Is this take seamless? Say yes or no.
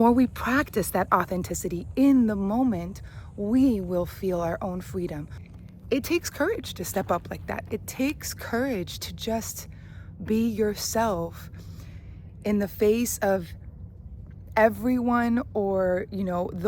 no